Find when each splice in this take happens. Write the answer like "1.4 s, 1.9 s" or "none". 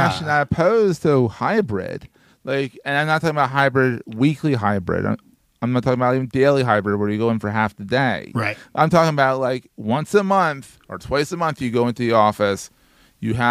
none